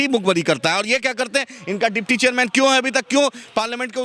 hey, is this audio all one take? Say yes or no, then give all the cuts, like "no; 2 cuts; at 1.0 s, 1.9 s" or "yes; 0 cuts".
yes; 0 cuts